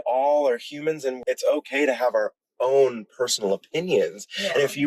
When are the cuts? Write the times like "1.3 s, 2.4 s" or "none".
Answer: 1.1 s